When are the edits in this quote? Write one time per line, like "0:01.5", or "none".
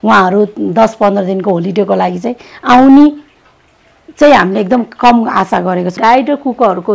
0:06.0